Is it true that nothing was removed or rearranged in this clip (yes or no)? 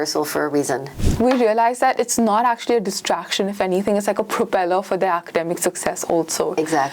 no